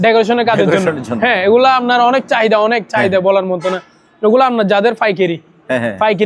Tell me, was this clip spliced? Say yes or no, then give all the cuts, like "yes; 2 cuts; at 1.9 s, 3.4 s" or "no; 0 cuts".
no; 0 cuts